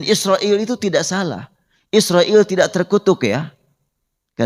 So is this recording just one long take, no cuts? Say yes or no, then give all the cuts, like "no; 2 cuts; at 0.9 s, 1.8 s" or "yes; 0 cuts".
yes; 0 cuts